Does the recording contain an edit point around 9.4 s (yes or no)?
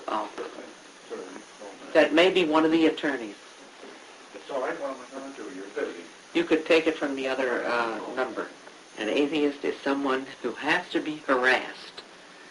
yes